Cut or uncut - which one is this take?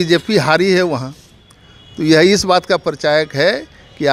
uncut